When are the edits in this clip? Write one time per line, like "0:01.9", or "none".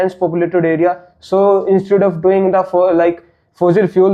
none